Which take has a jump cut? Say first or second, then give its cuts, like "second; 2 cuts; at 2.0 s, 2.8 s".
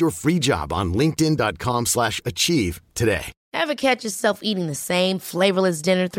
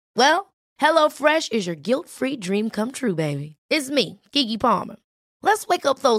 first; 1 cut; at 3.3 s